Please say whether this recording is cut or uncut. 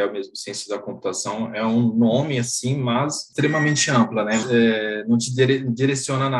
cut